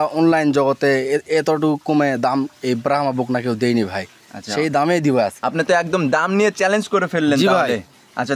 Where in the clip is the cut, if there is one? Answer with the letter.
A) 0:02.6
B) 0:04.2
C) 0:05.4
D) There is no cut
C